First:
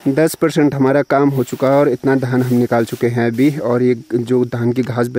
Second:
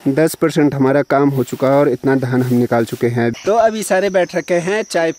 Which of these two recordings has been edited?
second; 1 cut; at 3.4 s

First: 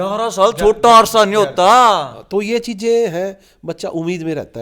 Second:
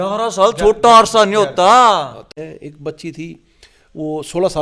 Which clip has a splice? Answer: second; 1 cut; at 2.3 s

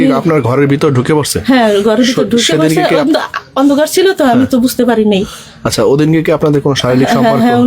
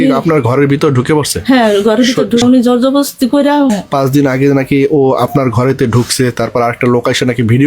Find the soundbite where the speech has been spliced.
second; 2 cuts; at 2.4 s, 3.7 s

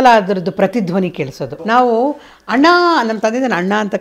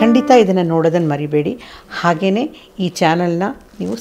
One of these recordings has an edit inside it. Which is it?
first; 1 cut; at 1.5 s

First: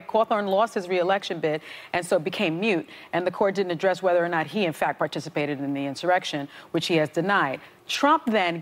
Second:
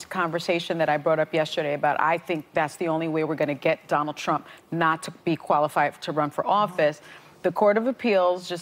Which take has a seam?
second; 1 cut; at 1.5 s

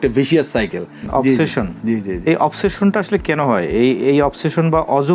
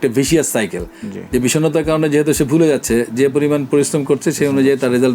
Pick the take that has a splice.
first; 1 cut; at 1.0 s

